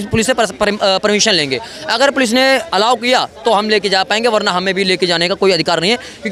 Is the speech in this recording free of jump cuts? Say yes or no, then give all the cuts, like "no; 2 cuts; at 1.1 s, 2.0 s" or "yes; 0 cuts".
yes; 0 cuts